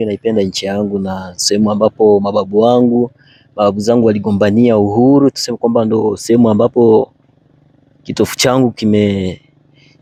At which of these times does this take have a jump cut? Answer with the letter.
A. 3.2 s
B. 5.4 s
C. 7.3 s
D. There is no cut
D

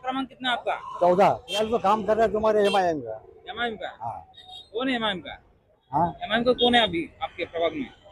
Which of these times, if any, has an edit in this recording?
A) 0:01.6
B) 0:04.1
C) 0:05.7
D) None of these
A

